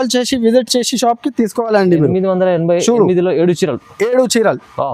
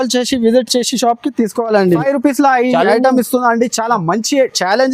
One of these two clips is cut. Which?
second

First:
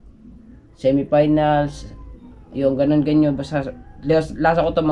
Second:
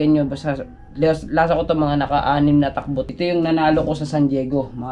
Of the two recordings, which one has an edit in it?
second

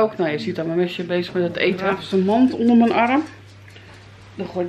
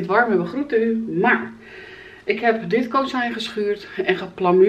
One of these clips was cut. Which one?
first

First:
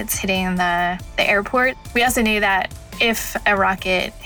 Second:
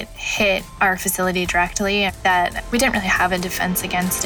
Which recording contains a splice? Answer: first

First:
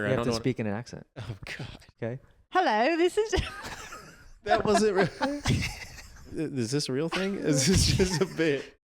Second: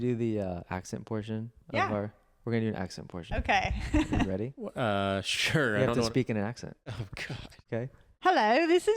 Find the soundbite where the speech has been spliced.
first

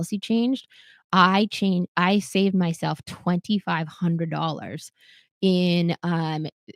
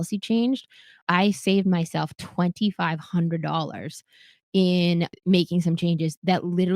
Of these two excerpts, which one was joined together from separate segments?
second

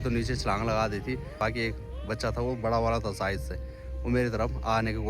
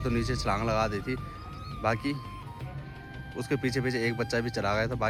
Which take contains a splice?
first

